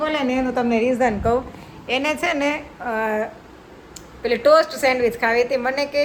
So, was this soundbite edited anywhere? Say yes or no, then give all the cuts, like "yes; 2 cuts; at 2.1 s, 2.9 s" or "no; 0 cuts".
no; 0 cuts